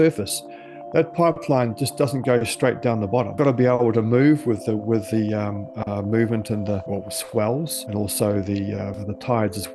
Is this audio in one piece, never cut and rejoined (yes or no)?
yes